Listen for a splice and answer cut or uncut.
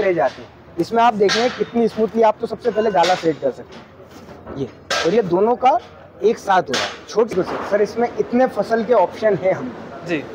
cut